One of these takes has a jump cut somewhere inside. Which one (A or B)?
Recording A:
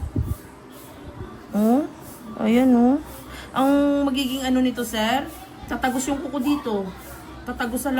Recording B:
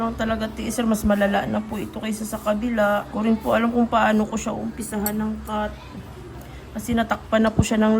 B